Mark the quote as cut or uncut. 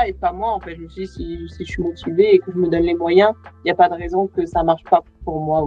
uncut